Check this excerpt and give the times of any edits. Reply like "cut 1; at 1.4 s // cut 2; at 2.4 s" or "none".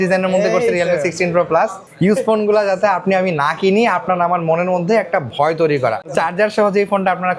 cut 1; at 1.8 s // cut 2; at 6.1 s